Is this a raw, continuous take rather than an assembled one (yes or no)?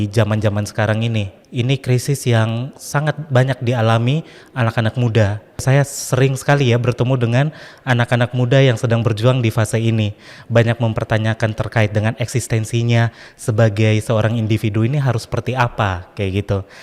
no